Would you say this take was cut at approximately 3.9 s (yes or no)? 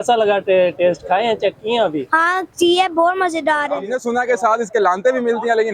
yes